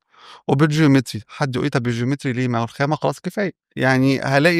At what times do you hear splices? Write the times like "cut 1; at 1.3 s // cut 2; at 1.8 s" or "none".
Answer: cut 1; at 3.6 s